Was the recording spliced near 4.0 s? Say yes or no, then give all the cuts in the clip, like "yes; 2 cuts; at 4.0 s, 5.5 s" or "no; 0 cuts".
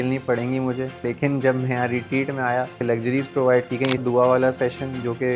yes; 3 cuts; at 1.0 s, 2.8 s, 4.0 s